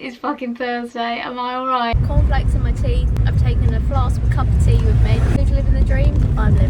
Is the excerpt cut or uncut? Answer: cut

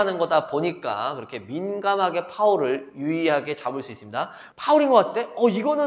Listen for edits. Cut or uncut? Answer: cut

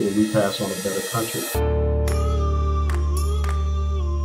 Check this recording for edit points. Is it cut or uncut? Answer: cut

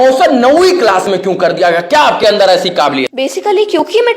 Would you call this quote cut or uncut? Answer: cut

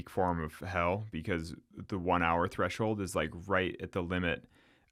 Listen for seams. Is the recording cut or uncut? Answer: uncut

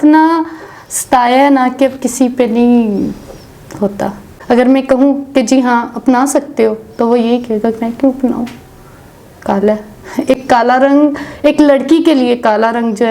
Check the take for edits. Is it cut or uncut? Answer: cut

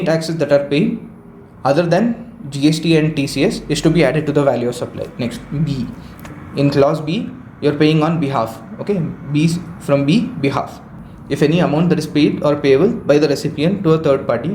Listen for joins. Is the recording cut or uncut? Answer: uncut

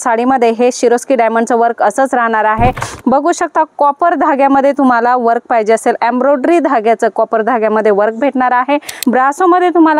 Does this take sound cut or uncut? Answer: cut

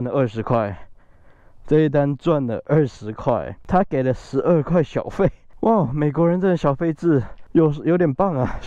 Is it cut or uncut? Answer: cut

